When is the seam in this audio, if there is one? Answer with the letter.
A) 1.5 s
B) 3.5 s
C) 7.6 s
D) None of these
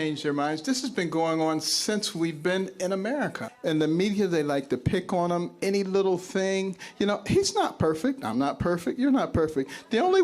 B